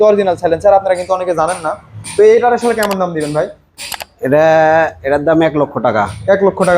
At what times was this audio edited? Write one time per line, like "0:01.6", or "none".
none